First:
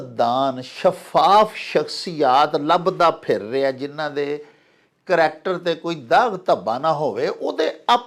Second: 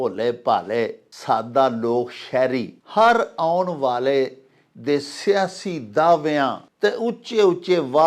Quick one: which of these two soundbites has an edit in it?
second; 3 cuts; at 1.1 s, 2.8 s, 6.7 s

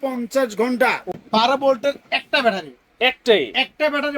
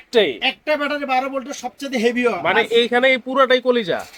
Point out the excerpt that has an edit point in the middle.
first; 1 cut; at 1.1 s

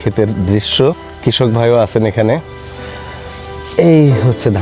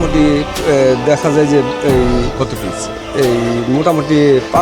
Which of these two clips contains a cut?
first; 1 cut; at 1.2 s

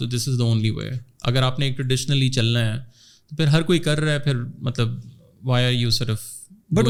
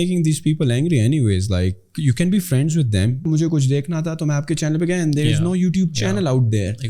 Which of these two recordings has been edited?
second; 1 cut; at 3.2 s

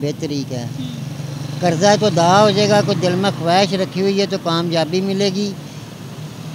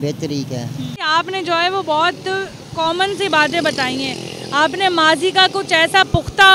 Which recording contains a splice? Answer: second; 1 cut; at 1.1 s

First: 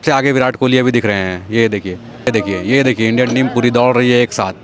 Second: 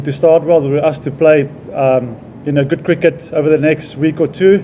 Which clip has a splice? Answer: first; 1 cut; at 2.3 s

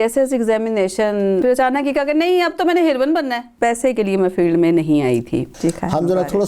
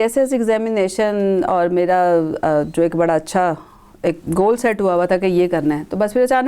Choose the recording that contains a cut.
first; 3 cuts; at 1.4 s, 3.5 s, 5.5 s

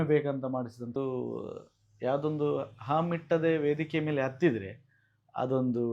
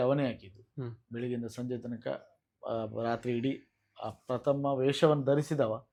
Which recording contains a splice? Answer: first; 1 cut; at 1.0 s

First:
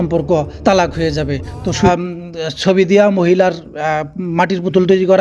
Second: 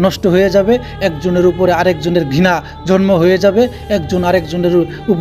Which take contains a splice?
first; 1 cut; at 1.9 s

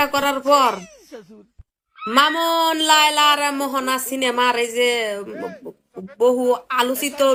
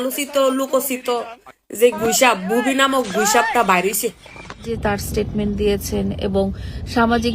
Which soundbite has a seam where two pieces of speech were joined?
second; 1 cut; at 4.7 s

